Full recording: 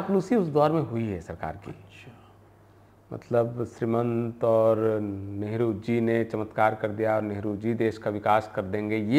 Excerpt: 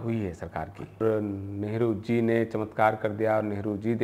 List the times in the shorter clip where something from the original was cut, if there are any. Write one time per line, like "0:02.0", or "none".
0:01.0